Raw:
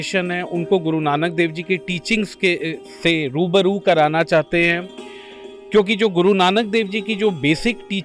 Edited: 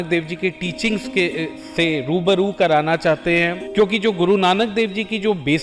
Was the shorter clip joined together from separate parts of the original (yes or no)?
yes